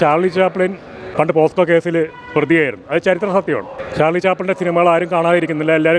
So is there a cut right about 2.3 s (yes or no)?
no